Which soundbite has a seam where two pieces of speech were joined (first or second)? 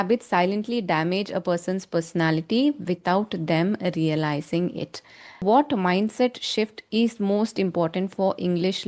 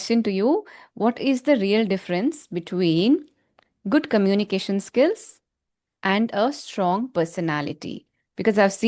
first